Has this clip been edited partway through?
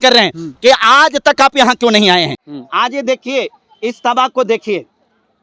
yes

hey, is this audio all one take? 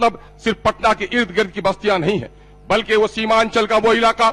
yes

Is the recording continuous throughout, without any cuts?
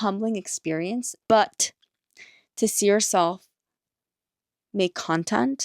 no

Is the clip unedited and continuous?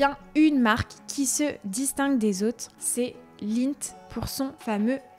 yes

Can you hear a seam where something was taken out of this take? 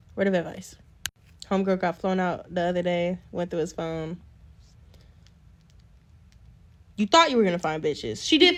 no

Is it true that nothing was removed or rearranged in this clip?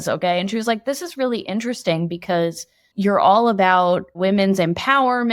no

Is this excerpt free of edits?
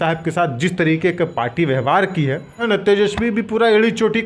no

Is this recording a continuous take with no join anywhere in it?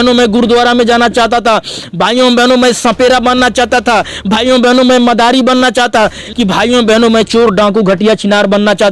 no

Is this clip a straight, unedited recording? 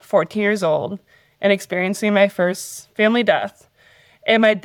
yes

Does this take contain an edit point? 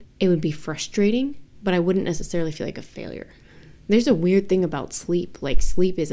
no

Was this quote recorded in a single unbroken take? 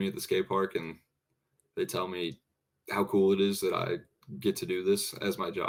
yes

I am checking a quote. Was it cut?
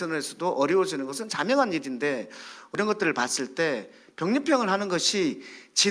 yes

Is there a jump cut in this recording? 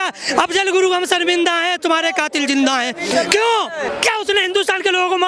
yes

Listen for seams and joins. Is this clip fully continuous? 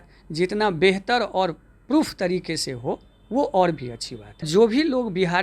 no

